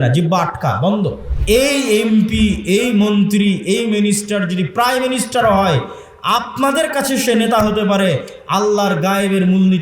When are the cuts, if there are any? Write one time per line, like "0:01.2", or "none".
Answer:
0:01.3